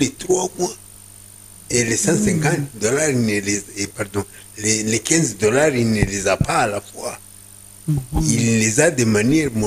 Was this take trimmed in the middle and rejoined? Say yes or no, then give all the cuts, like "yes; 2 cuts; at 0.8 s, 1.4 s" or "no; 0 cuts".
no; 0 cuts